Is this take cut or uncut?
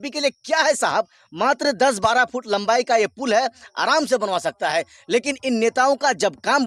uncut